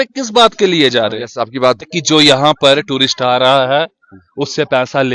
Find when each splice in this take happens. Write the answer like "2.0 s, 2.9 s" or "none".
1.9 s